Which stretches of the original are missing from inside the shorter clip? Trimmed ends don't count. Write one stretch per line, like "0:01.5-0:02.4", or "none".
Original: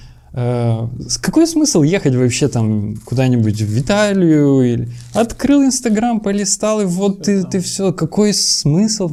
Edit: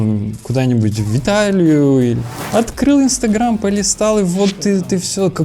none